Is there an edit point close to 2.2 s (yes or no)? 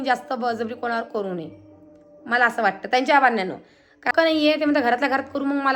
no